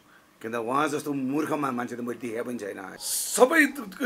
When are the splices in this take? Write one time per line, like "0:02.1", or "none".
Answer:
0:02.9